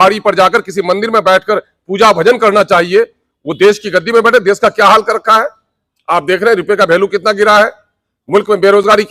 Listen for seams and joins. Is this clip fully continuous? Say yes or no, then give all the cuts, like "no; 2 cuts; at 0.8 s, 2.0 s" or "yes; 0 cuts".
yes; 0 cuts